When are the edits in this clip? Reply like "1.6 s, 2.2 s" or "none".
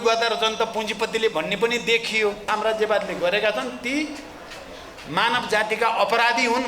2.4 s